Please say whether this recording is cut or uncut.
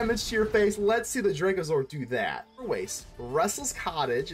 cut